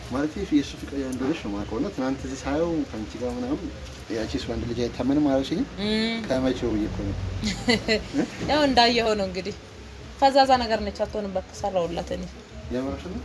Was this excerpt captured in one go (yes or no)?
yes